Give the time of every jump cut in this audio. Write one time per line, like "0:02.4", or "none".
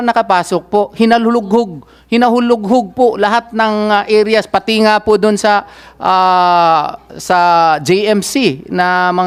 none